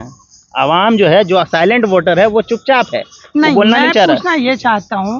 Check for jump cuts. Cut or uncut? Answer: uncut